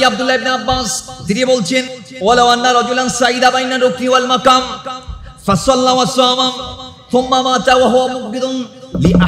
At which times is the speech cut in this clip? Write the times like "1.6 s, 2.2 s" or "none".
1.0 s, 2.0 s